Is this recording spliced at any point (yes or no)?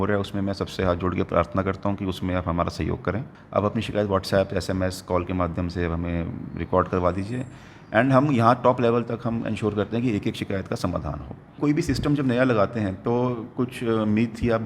yes